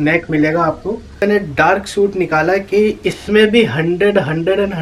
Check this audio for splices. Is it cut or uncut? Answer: cut